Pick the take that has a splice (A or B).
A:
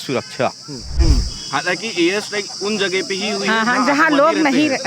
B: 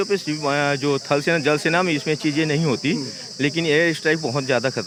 A